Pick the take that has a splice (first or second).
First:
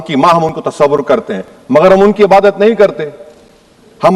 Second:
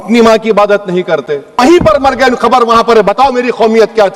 second